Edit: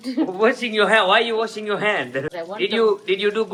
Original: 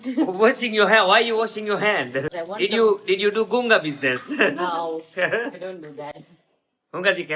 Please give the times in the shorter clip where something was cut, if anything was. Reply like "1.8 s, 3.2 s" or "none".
none